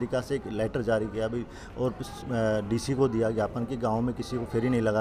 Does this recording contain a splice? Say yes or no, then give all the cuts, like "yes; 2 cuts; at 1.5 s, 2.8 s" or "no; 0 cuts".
no; 0 cuts